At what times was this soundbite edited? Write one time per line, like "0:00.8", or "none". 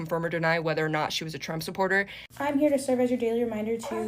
0:02.2